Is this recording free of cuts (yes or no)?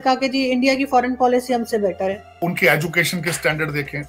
no